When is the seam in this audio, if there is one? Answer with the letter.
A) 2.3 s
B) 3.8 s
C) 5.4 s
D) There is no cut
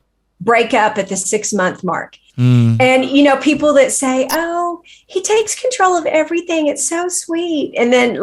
A